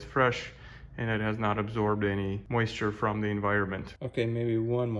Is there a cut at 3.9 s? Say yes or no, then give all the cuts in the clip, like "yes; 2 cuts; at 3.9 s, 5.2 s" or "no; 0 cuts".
yes; 1 cut; at 3.9 s